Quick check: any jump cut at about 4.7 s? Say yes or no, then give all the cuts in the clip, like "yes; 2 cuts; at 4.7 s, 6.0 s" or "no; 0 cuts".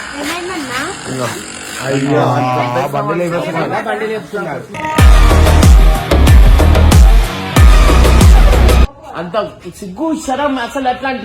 no; 1 cut; at 9.0 s